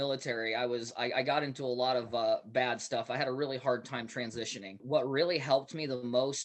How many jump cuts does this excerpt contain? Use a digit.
1